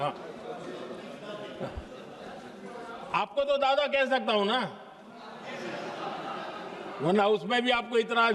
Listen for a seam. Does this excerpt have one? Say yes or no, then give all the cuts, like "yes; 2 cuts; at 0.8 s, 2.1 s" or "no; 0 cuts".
no; 0 cuts